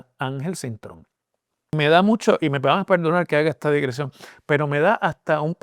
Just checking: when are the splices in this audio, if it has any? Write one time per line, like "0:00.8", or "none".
0:01.7

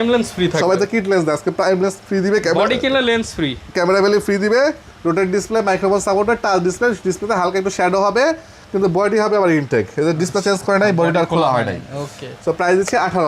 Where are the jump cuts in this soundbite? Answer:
none

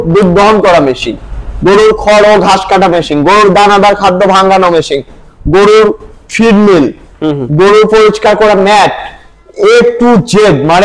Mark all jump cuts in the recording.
none

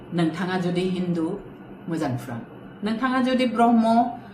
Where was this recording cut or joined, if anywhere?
none

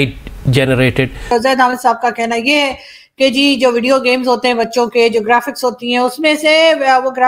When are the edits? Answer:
0:01.2

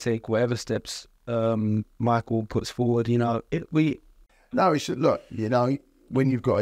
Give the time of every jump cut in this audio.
0:04.2

